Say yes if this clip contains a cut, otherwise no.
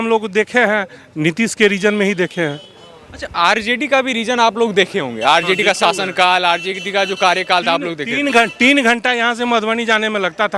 no